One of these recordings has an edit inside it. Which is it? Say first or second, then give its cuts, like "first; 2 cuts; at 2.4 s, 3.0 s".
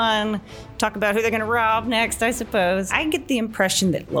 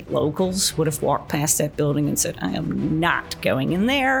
first; 1 cut; at 2.9 s